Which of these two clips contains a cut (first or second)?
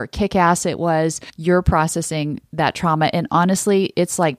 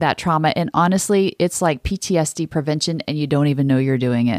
first